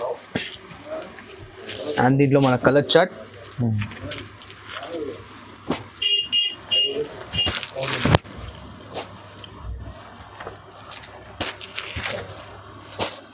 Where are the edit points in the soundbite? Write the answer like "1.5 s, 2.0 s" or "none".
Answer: none